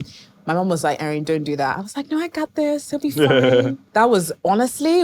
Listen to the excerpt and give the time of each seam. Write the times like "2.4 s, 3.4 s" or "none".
3.8 s